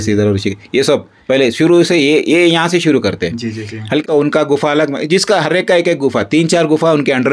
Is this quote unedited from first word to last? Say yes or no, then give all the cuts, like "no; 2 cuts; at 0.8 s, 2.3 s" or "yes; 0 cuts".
no; 1 cut; at 4.0 s